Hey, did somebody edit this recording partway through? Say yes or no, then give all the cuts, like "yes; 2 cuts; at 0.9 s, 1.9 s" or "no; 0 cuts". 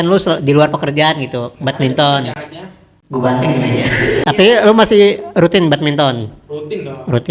yes; 1 cut; at 4.2 s